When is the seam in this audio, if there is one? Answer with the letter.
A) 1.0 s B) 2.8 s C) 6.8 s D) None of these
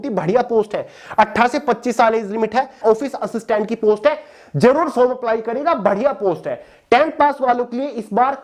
B